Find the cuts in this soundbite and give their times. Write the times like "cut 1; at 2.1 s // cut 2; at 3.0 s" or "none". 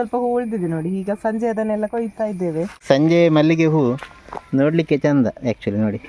cut 1; at 2.8 s